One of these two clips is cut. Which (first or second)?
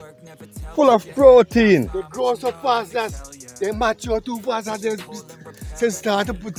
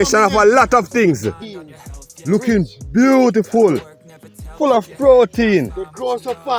second